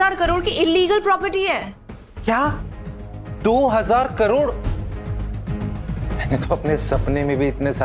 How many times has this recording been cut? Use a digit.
1